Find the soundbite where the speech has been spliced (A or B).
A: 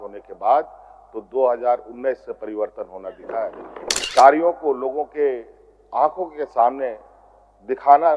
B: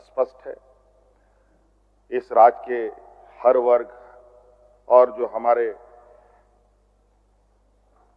A